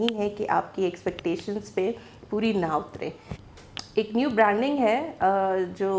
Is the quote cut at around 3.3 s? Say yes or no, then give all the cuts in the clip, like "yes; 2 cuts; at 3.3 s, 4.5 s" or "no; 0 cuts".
no; 0 cuts